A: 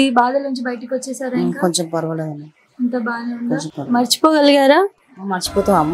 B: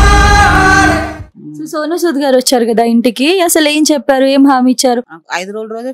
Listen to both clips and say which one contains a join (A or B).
B